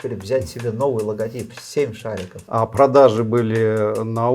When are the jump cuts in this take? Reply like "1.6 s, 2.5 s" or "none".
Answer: 2.4 s